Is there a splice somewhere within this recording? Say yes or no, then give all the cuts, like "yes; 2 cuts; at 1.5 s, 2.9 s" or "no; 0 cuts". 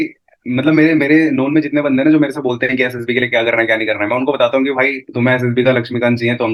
no; 0 cuts